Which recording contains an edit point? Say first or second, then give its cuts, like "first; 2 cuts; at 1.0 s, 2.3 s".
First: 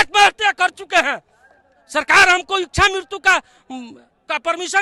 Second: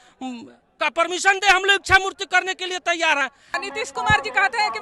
second; 1 cut; at 3.6 s